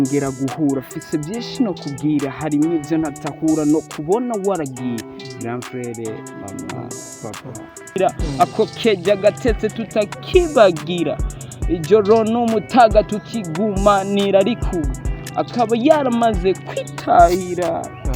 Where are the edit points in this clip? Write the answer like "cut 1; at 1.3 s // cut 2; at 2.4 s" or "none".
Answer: cut 1; at 8.0 s